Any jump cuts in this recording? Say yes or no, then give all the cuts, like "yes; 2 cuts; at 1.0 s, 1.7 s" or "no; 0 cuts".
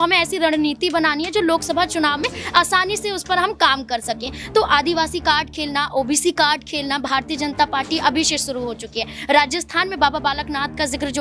no; 0 cuts